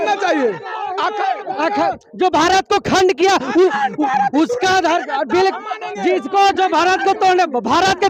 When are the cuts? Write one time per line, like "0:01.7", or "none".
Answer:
none